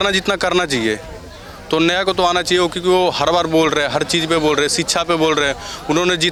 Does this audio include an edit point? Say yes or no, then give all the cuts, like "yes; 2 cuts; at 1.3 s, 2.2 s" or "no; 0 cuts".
no; 0 cuts